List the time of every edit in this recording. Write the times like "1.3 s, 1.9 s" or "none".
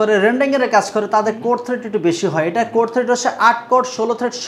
none